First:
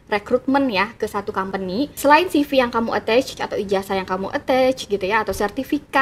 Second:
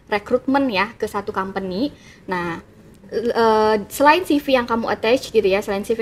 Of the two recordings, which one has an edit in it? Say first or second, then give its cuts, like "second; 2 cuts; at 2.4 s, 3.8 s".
first; 2 cuts; at 1.8 s, 3.3 s